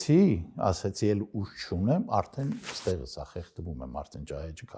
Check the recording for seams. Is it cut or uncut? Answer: uncut